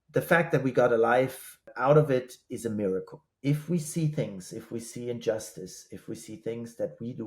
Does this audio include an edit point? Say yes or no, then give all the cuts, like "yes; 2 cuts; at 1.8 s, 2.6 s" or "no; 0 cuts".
yes; 1 cut; at 3.2 s